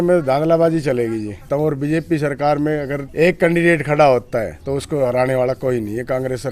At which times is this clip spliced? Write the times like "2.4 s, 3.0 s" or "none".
1.4 s, 3.0 s, 4.6 s